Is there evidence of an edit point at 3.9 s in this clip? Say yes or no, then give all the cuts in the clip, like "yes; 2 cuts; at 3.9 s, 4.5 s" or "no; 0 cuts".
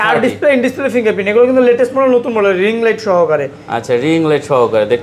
no; 0 cuts